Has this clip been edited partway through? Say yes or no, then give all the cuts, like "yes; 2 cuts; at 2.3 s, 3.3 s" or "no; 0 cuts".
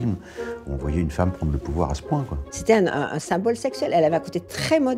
yes; 1 cut; at 2.5 s